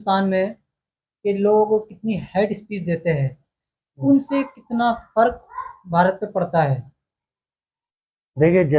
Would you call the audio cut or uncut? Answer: uncut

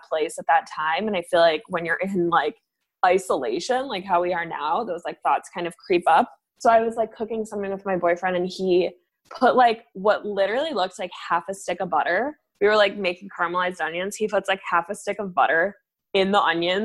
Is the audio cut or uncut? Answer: cut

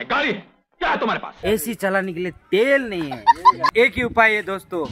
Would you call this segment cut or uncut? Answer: cut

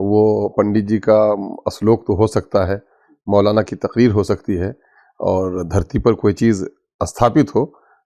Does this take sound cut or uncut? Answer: uncut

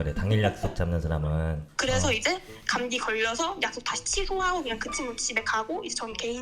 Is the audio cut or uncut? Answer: cut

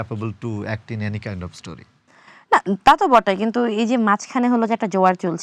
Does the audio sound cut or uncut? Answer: uncut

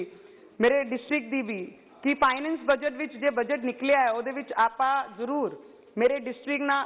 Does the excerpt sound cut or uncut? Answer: uncut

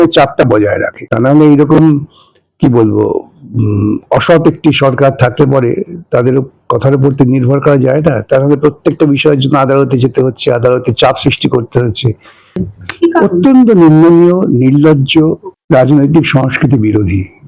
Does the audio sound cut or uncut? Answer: cut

